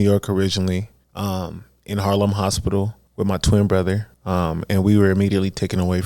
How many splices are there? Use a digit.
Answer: 3